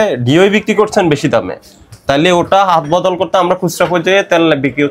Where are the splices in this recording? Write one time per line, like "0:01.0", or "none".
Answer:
none